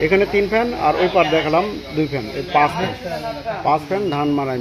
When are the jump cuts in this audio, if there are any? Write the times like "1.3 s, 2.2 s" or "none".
none